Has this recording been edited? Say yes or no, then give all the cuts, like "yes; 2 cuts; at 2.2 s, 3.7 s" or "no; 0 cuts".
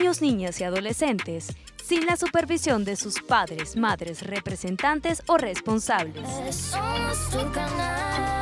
no; 0 cuts